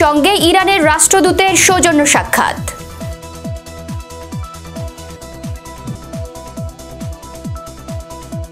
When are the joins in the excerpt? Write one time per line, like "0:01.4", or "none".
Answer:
0:02.6

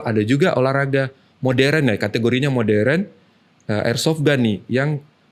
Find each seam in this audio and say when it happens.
none

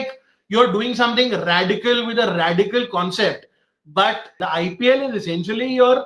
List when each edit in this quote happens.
0:04.4

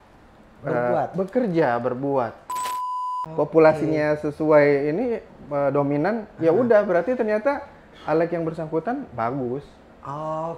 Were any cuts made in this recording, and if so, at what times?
0:02.7

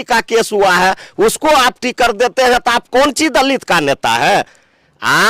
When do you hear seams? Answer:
none

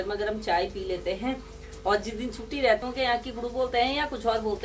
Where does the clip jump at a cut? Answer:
0:02.8

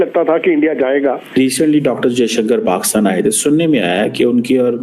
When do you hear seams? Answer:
0:01.4

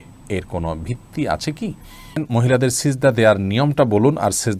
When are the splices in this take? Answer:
0:02.2

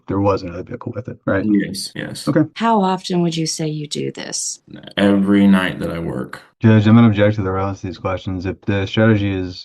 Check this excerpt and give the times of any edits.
0:02.5

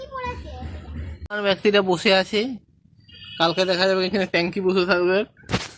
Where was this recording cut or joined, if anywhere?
0:01.2

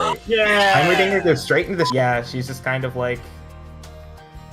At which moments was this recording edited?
0:01.9

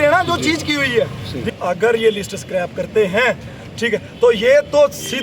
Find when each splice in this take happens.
0:01.5

